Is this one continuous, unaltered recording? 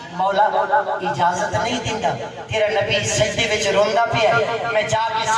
yes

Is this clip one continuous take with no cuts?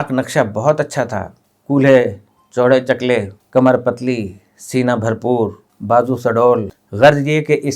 no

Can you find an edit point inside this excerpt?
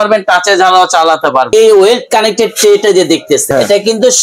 yes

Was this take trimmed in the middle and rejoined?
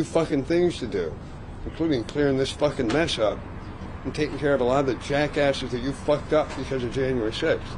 no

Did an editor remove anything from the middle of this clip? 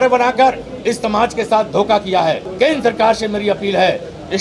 yes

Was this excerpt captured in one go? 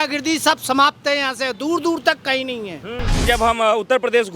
no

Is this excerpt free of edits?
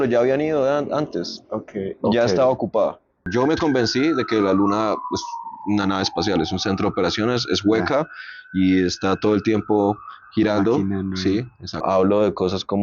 no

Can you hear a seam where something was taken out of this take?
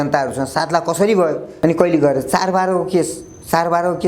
yes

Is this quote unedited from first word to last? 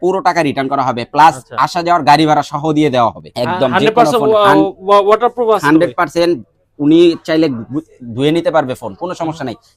no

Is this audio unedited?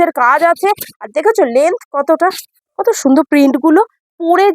no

